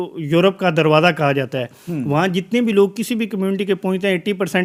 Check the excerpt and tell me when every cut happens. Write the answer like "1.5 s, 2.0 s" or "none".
none

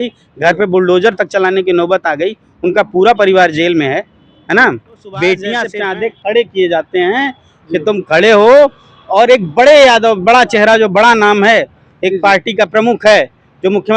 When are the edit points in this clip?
5.7 s

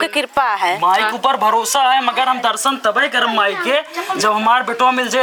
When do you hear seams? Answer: none

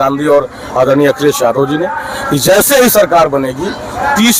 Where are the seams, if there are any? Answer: none

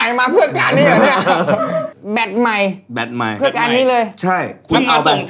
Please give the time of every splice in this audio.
none

